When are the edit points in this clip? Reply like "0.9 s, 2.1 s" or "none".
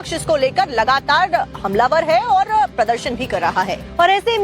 2.5 s

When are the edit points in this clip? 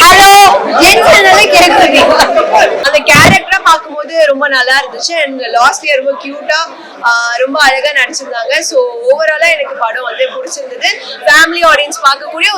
2.8 s

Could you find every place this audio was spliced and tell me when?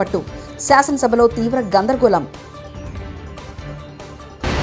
none

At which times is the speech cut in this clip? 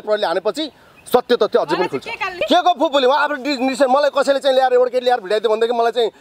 2.3 s

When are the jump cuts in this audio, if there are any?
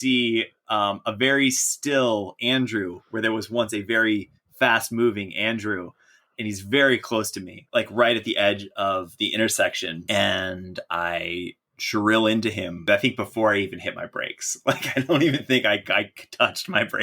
7.6 s, 10.0 s, 12.9 s

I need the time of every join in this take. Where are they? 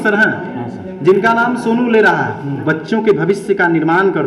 2.6 s

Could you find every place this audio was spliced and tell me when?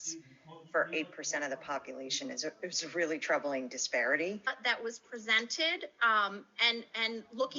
4.6 s

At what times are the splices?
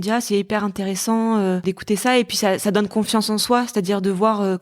1.6 s

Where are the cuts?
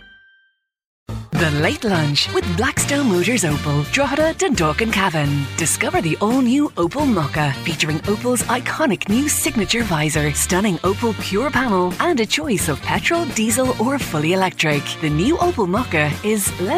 1.0 s

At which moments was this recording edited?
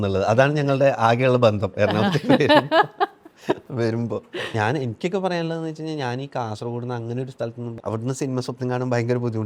4.5 s, 7.7 s

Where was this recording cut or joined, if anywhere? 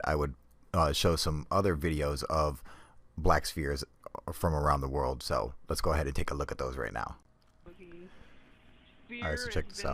4.2 s

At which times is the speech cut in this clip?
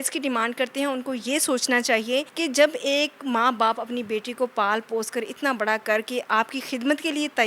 2.3 s

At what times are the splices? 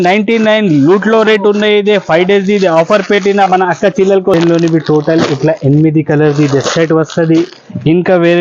4.3 s

